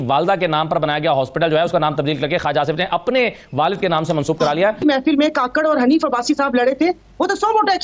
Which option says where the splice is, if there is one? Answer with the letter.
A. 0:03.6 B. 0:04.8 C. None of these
B